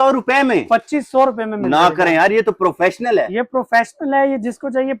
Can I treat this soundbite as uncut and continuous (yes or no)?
yes